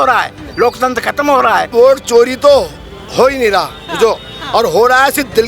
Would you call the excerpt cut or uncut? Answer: cut